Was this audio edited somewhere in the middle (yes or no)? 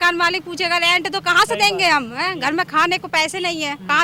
no